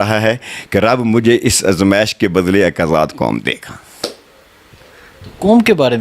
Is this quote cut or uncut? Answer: uncut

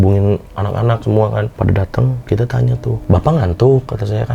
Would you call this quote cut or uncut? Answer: cut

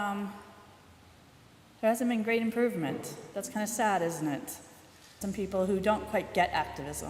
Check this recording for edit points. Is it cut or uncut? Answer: uncut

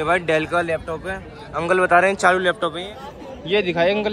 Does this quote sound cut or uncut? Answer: cut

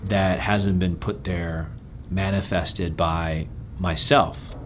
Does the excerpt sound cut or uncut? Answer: cut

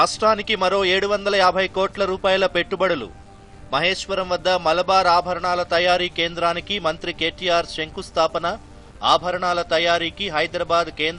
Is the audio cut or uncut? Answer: uncut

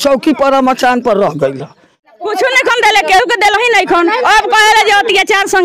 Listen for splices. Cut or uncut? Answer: cut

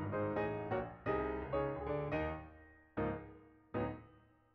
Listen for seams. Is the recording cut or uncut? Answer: uncut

